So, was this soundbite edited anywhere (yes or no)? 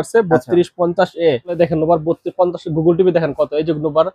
yes